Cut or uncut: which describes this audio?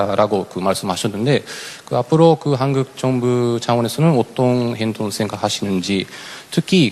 uncut